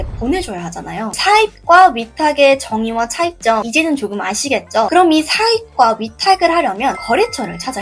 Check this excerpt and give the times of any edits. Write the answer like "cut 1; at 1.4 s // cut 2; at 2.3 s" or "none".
cut 1; at 1.2 s